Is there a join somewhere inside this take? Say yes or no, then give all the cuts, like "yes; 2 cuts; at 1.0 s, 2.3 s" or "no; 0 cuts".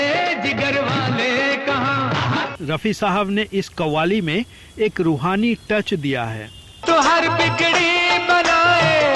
yes; 1 cut; at 2.6 s